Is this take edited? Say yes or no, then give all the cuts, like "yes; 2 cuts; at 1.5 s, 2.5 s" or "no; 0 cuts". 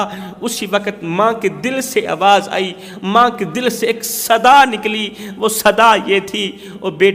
no; 0 cuts